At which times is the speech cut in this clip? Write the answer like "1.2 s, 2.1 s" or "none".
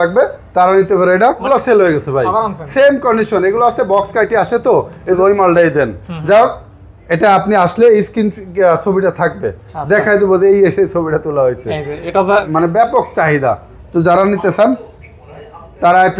1.4 s, 5.2 s, 12.5 s